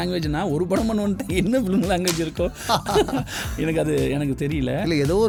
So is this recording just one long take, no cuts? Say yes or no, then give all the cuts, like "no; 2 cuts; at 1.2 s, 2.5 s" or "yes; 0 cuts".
yes; 0 cuts